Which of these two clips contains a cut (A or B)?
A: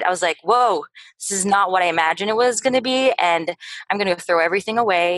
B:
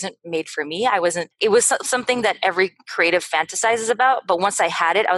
B